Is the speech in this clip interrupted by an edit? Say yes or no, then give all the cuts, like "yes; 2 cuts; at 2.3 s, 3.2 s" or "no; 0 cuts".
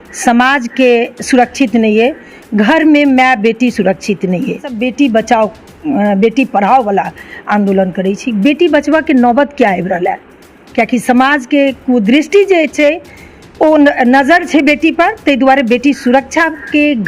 yes; 1 cut; at 4.8 s